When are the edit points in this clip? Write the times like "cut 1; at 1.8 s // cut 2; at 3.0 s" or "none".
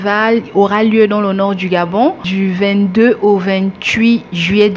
none